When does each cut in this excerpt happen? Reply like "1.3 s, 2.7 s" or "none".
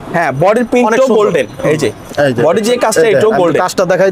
none

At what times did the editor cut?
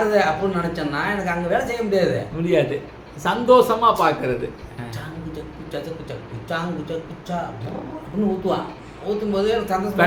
none

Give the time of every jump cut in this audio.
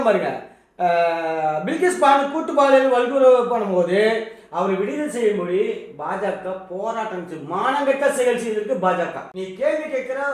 9.2 s

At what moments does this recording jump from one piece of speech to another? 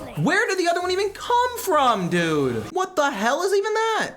2.6 s

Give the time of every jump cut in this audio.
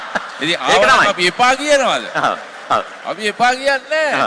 3.0 s

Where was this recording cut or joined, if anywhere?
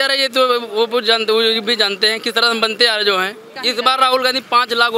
3.5 s

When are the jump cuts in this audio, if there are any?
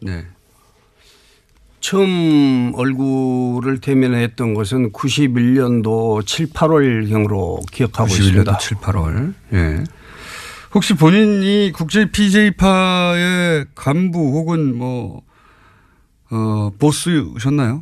3.3 s

